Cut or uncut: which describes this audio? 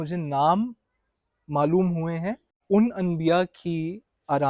cut